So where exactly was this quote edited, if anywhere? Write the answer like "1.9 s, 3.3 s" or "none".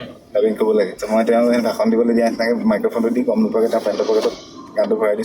1.0 s